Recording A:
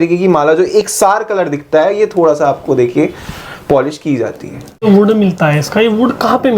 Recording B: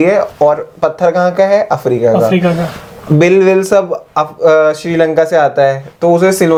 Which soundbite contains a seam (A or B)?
A